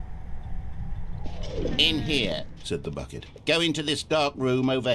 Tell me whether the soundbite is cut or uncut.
cut